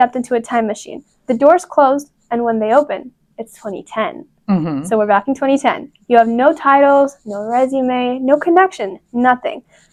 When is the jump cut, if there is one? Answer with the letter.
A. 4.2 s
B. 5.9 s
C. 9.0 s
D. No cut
D